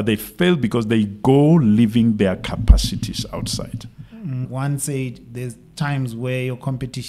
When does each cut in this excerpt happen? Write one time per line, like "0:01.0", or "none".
0:04.4